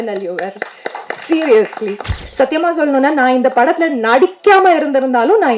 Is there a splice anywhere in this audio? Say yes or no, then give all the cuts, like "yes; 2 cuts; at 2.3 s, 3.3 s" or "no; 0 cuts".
yes; 1 cut; at 2.2 s